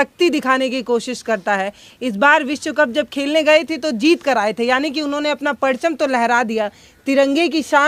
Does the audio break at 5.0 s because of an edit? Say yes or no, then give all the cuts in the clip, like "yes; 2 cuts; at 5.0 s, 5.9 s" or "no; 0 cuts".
no; 0 cuts